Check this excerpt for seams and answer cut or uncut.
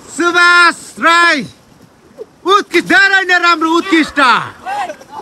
uncut